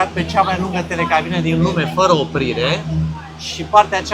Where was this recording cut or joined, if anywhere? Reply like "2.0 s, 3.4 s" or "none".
none